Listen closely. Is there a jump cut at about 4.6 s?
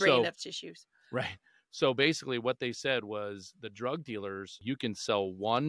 yes; 1 cut; at 4.6 s

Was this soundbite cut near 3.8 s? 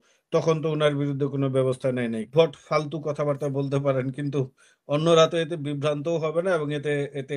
no; 1 cut; at 2.3 s

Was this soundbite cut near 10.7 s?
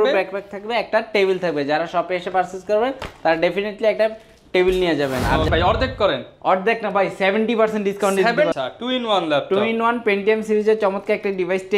no; 2 cuts; at 5.5 s, 8.5 s

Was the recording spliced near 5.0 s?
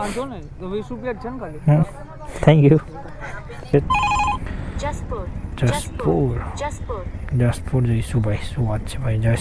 no; 1 cut; at 3.7 s

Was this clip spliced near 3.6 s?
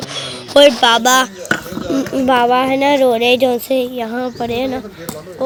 no; 0 cuts

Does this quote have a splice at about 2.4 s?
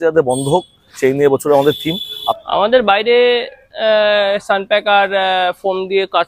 yes; 1 cut; at 2.4 s

